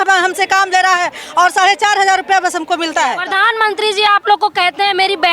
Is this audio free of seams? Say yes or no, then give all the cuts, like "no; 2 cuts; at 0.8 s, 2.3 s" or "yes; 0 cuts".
no; 1 cut; at 3.3 s